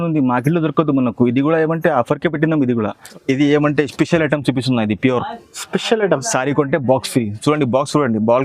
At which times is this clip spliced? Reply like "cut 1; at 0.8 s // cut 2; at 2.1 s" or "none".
cut 1; at 3.1 s